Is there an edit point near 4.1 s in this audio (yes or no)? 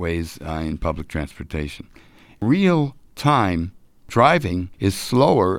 yes